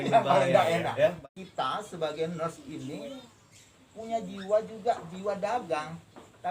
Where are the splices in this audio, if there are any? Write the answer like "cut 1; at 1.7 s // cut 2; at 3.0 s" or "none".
cut 1; at 1.2 s